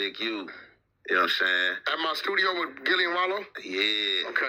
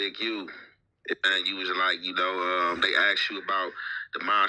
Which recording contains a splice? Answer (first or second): second